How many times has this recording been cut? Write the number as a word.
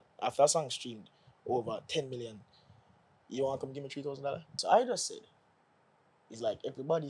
one